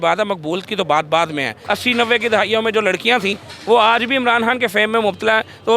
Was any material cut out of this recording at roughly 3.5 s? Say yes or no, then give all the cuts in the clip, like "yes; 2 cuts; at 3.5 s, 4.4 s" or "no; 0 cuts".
no; 1 cut; at 1.5 s